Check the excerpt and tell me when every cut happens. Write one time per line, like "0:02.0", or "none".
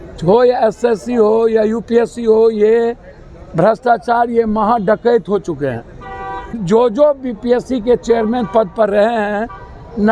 0:06.6